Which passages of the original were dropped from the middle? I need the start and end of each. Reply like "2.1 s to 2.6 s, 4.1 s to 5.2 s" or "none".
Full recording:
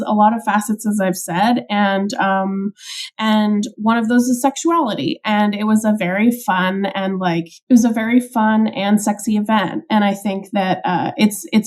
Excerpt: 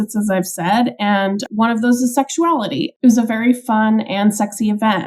2.1 s to 3.7 s, 5.2 s to 7.6 s